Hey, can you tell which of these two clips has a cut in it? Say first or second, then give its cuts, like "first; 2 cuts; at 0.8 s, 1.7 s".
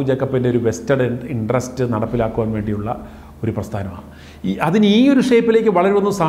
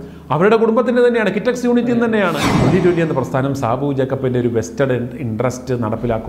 second; 1 cut; at 2.5 s